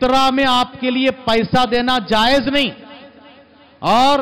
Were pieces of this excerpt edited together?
no; 0 cuts

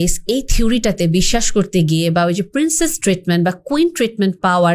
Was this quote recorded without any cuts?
yes; 0 cuts

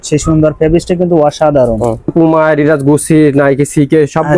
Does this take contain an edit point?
yes; 1 cut; at 2.1 s

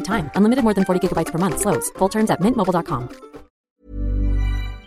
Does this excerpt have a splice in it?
yes; 1 cut; at 3.5 s

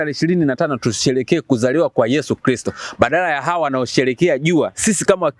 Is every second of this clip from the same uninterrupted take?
yes; 0 cuts

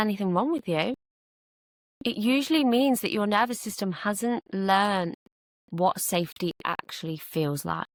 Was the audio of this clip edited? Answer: no; 0 cuts

